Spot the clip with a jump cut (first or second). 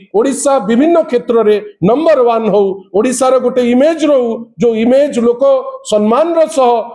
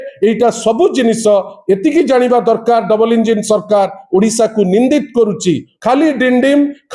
second